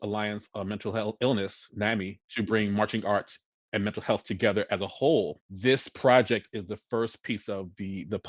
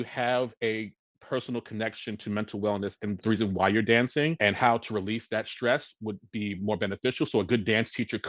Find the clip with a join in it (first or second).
first